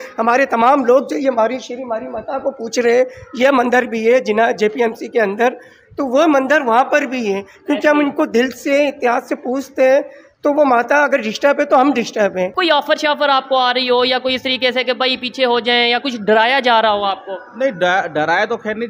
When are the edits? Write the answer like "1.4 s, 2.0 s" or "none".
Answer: 12.5 s

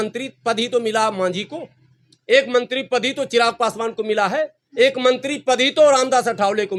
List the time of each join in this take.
none

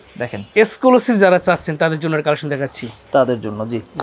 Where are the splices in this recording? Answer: none

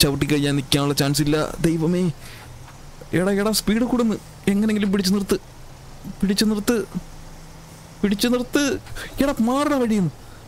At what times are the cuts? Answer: none

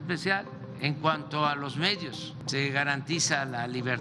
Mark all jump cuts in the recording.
none

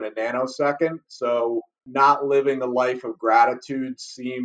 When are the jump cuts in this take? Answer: 1.8 s

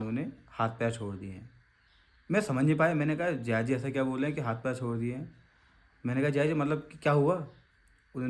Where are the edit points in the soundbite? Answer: none

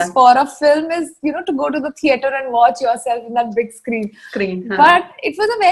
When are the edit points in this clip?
none

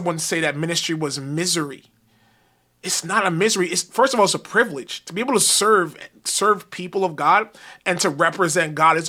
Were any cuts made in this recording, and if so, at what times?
none

